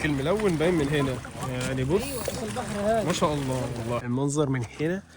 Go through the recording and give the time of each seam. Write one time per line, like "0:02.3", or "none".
0:04.0